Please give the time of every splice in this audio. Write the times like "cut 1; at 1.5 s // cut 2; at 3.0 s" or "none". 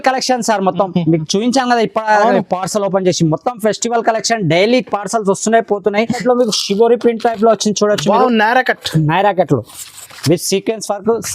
cut 1; at 6.2 s